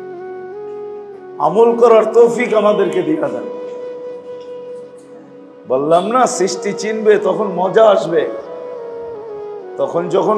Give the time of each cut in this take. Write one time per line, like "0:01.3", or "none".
none